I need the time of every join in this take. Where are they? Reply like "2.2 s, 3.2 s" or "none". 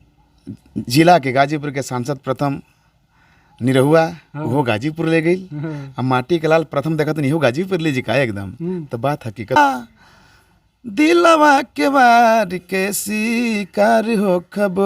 9.6 s